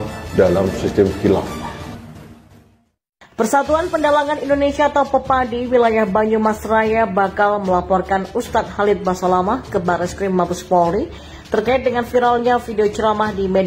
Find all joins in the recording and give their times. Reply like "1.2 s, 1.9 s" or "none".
none